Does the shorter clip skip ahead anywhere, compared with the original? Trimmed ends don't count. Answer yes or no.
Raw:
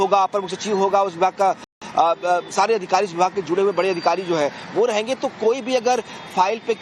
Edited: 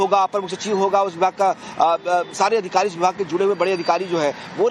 yes